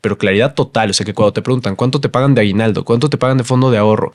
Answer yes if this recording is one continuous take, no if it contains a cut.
yes